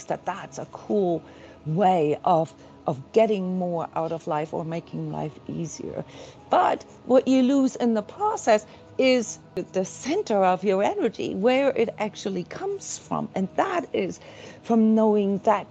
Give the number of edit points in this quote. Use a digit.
1